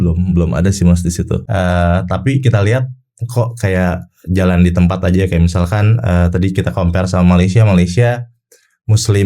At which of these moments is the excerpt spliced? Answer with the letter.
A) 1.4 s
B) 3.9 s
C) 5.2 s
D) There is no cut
A